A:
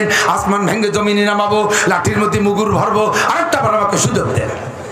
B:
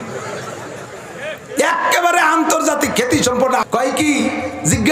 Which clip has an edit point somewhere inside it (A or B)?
B